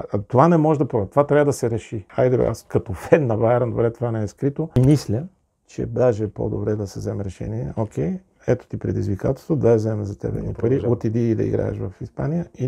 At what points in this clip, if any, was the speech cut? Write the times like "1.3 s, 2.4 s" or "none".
2.0 s, 4.8 s